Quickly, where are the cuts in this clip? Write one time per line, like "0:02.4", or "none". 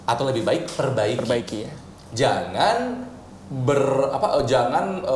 none